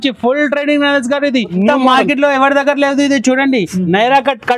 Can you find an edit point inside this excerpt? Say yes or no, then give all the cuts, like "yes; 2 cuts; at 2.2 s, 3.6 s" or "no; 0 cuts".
yes; 1 cut; at 1.5 s